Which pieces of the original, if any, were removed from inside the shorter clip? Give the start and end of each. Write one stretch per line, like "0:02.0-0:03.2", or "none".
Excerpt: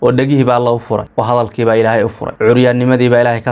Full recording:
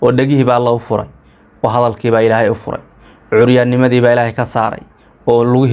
0:01.1-0:01.5
0:02.7-0:03.2